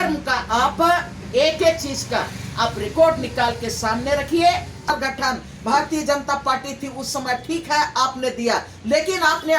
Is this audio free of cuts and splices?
no; 1 cut; at 4.9 s

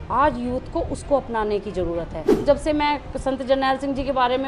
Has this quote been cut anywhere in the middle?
yes; 1 cut; at 2.4 s

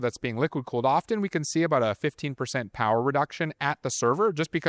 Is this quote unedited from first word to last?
yes; 0 cuts

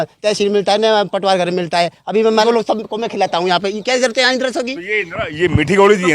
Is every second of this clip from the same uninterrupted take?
no; 1 cut; at 2.3 s

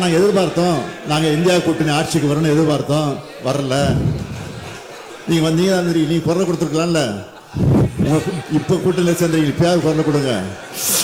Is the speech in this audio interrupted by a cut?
no; 0 cuts

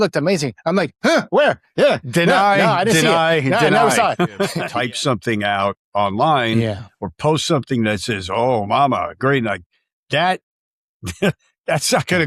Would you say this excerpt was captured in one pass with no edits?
no; 1 cut; at 4.6 s

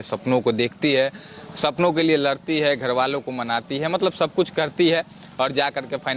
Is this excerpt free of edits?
yes; 0 cuts

